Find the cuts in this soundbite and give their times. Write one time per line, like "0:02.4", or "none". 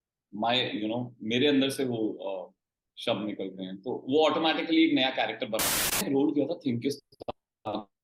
0:06.0